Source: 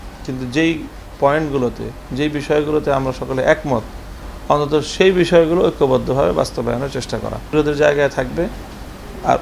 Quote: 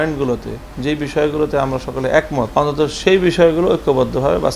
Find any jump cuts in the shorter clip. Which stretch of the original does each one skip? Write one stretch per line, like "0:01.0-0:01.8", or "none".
0:03.8-0:04.4